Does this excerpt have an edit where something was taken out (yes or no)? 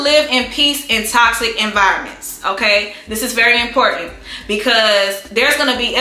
no